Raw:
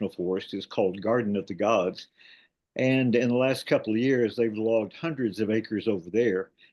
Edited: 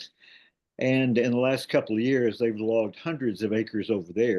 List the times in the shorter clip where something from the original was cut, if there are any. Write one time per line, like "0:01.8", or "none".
none